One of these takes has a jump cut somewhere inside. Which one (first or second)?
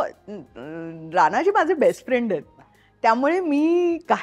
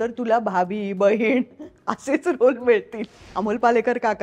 second